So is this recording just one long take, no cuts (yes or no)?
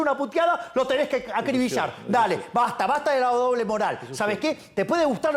yes